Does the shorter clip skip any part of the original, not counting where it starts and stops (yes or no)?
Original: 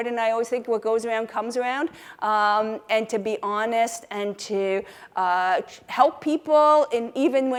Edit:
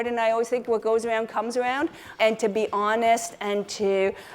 yes